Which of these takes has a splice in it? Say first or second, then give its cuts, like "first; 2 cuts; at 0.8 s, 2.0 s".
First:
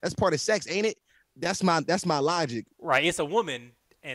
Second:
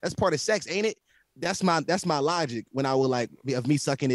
first; 1 cut; at 2.8 s